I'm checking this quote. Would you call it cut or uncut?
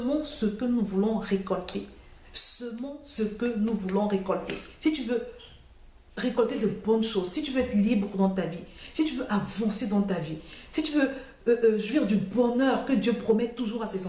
uncut